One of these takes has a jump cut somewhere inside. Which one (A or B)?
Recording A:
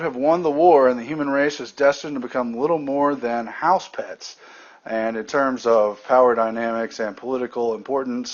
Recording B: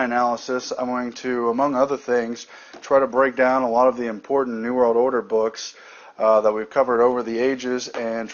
B